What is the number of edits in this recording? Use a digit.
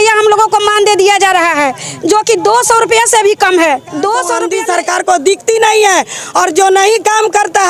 1